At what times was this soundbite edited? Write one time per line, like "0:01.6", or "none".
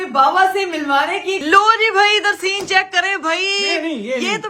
0:01.4